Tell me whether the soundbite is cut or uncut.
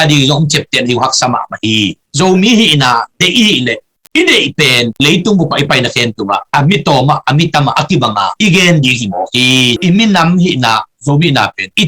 cut